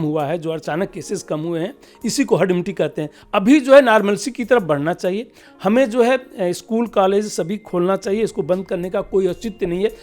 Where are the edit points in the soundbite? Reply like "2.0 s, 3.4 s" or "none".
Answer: 3.1 s